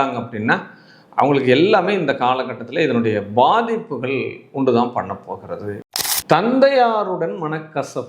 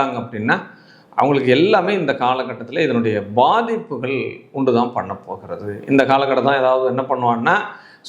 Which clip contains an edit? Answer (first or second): first